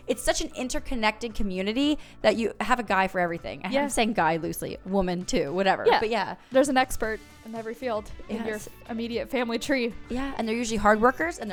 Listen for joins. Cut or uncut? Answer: uncut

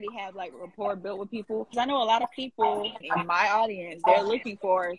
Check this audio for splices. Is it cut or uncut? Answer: cut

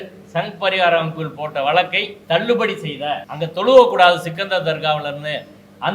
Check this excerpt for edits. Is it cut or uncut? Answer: cut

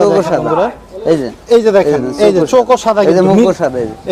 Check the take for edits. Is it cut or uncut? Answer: uncut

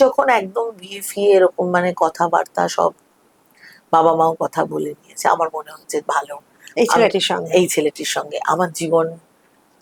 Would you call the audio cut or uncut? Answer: uncut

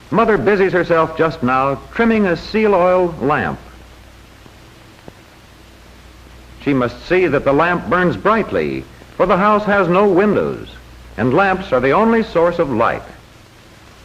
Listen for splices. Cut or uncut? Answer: cut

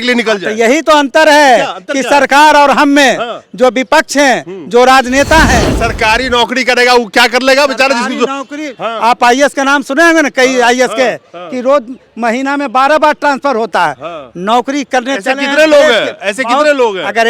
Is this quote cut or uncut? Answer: cut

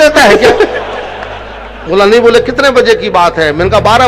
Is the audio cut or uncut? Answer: uncut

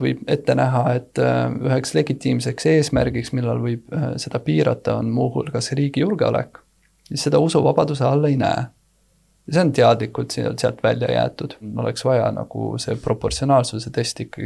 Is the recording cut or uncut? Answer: cut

